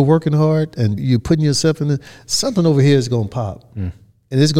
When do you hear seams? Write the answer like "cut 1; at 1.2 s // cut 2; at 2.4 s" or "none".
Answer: cut 1; at 1.0 s